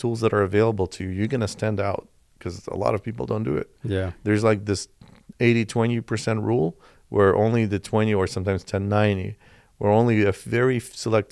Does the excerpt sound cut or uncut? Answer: uncut